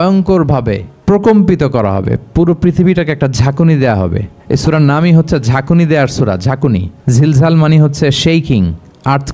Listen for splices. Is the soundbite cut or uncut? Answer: cut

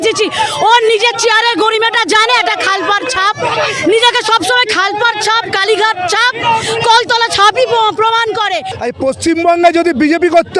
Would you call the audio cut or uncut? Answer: cut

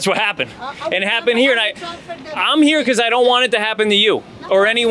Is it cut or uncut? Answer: uncut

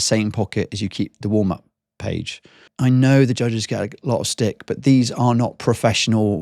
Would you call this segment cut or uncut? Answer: cut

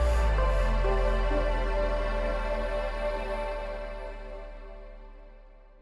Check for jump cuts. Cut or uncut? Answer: uncut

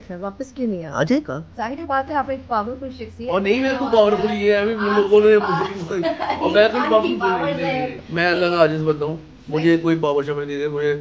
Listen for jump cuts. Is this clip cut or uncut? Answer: cut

